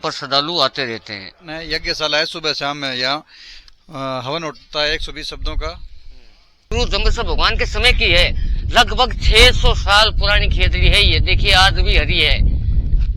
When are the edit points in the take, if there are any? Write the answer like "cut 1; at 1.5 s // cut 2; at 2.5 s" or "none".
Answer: cut 1; at 1.8 s // cut 2; at 6.7 s